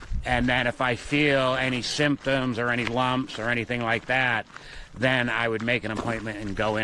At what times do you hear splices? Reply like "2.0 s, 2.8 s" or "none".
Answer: none